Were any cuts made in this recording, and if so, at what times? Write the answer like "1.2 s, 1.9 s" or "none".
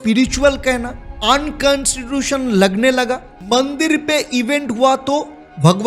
none